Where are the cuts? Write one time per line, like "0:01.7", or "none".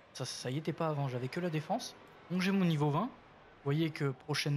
0:02.7